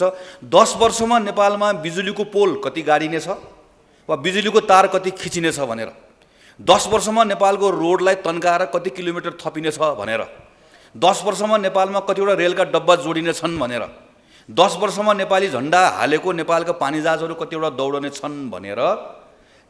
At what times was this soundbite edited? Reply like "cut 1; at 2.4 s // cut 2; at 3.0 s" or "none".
none